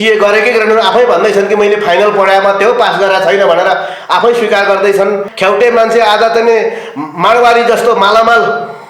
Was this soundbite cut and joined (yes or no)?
yes